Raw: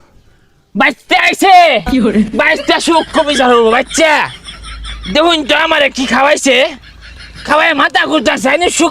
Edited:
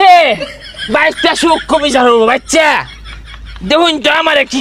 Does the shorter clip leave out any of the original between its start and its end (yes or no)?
no